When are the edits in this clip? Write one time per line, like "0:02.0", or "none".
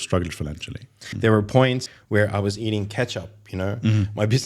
0:01.0
0:01.9